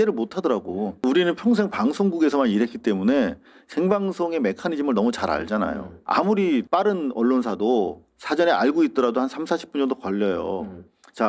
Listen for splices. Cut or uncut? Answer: cut